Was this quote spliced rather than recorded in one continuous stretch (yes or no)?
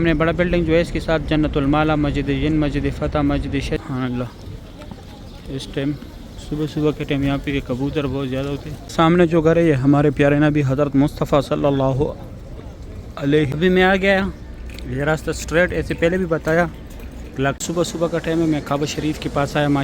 yes